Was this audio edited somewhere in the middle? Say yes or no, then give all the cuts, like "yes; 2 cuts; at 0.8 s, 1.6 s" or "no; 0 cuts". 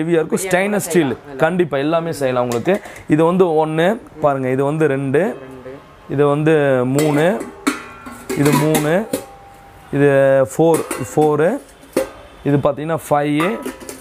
no; 0 cuts